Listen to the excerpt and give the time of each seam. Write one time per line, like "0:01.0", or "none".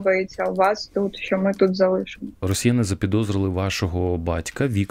0:02.4

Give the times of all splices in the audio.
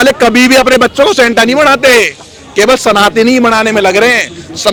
none

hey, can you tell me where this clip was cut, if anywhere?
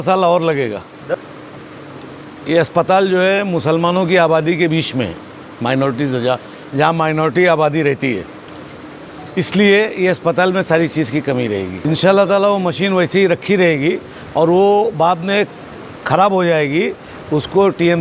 0:01.1
0:11.8

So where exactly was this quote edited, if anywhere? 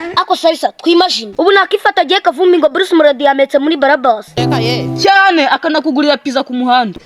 0:01.3

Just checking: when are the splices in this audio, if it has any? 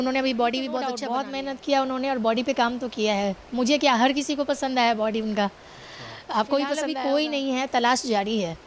0:01.0
0:06.9

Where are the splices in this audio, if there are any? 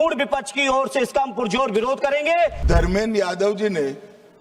0:02.6

